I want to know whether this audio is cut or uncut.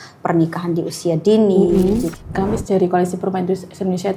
cut